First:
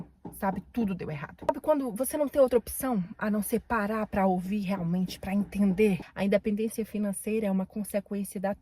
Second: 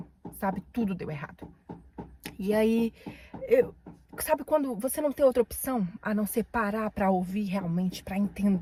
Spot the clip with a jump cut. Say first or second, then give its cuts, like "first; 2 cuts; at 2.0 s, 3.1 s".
first; 2 cuts; at 1.5 s, 6.1 s